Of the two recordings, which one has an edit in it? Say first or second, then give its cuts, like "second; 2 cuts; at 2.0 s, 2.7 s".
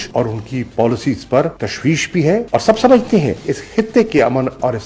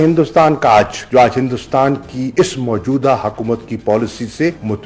first; 1 cut; at 3.4 s